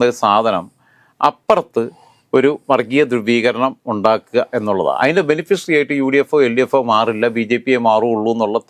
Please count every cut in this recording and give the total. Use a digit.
0